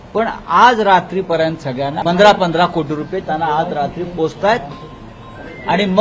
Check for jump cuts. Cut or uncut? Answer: cut